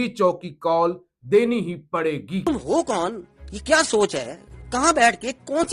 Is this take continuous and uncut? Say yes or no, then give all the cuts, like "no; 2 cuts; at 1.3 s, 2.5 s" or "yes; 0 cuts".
no; 1 cut; at 2.3 s